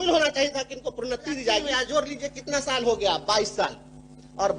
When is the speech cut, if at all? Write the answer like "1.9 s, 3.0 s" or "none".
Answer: 1.7 s